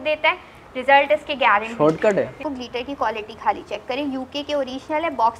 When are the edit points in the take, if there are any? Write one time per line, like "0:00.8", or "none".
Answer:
0:02.5